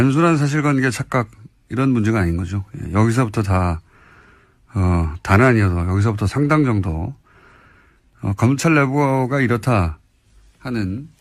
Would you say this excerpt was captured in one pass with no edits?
yes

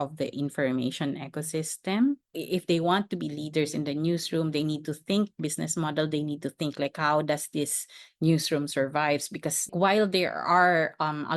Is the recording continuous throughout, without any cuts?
no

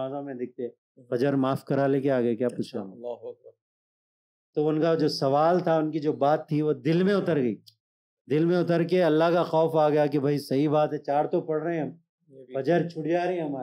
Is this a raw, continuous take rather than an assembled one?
yes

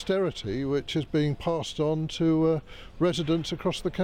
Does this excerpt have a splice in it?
no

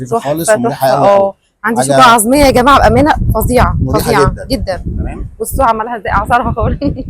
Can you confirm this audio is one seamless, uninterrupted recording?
yes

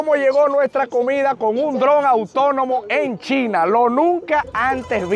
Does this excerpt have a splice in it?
no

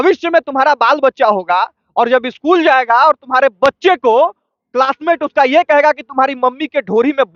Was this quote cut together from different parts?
no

